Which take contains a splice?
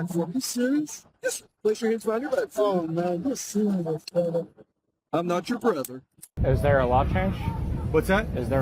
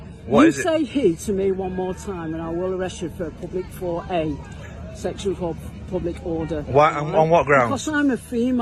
first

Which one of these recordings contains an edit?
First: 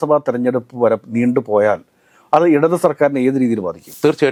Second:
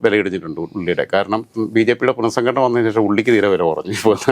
second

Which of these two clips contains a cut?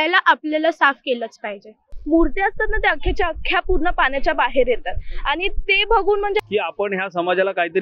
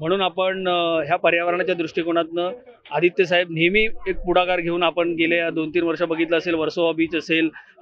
first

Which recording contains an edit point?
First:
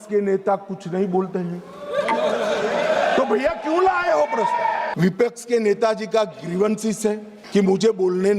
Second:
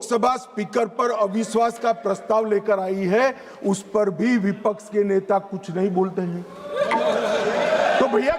first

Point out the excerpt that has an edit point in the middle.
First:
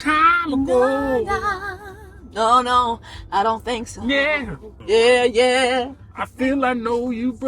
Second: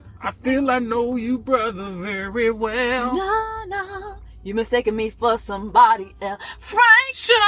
first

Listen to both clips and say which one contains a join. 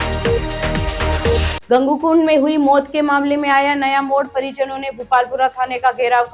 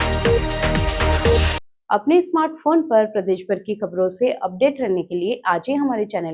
first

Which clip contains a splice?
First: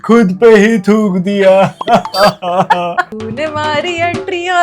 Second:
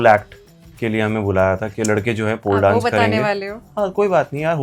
first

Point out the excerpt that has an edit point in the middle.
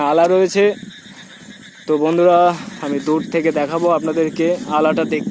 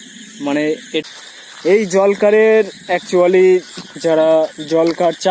second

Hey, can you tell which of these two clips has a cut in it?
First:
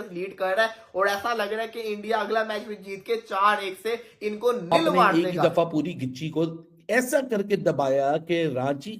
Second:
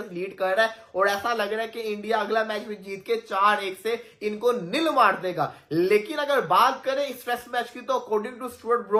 first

